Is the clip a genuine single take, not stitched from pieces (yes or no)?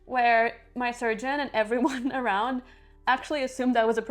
yes